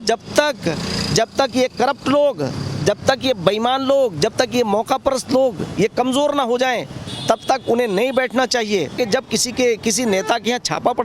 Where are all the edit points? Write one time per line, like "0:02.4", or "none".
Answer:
0:08.9